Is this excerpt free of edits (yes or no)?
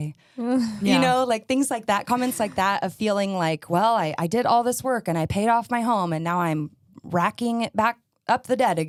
yes